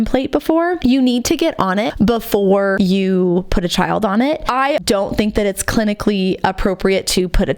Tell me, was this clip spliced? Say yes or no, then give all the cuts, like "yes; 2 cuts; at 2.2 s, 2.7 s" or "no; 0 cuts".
yes; 4 cuts; at 0.8 s, 1.9 s, 2.8 s, 4.8 s